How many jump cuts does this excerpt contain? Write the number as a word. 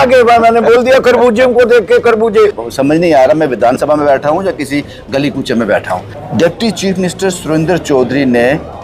two